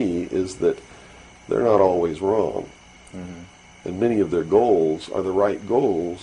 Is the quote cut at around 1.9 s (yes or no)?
no